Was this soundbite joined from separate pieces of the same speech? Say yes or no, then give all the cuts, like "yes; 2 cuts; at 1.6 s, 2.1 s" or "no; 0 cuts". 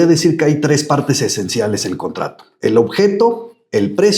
no; 0 cuts